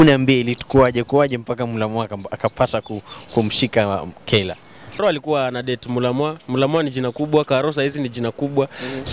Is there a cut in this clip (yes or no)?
yes